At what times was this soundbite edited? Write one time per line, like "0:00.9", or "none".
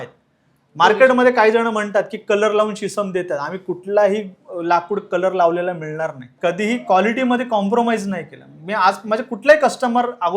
0:06.3